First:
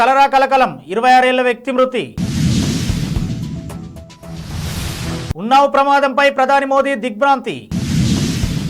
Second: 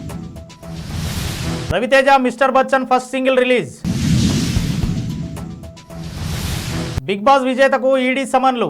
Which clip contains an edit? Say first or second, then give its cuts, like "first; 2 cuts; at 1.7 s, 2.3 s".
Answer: second; 1 cut; at 1.7 s